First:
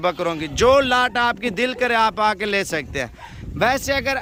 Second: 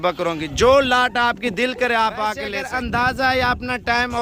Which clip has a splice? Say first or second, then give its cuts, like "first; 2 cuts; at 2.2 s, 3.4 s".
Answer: second; 1 cut; at 2.6 s